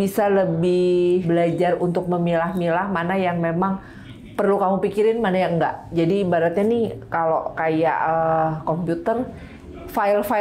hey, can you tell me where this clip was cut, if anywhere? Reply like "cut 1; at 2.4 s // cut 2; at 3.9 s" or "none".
cut 1; at 1.2 s